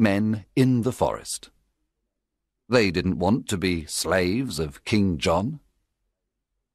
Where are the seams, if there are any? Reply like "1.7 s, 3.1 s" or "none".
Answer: 4.2 s